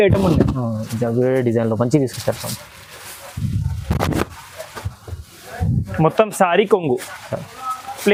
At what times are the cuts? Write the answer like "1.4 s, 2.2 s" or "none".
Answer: none